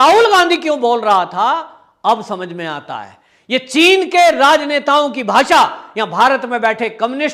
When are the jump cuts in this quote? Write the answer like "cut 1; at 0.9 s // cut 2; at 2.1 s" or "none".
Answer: none